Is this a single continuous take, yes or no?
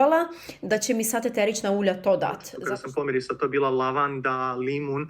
no